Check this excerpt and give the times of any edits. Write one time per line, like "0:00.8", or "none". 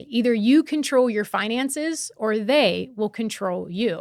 none